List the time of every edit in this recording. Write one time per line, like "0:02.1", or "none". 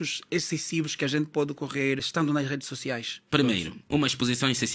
0:03.2